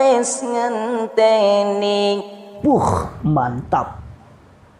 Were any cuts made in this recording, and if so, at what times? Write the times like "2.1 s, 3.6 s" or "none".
2.5 s